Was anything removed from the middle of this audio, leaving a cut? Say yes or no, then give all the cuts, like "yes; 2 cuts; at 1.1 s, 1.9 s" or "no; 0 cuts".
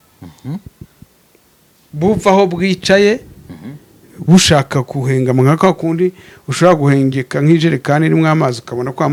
no; 0 cuts